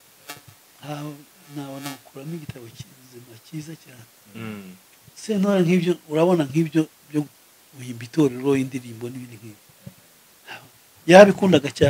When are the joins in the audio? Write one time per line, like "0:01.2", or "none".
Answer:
none